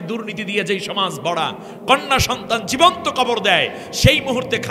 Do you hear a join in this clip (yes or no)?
no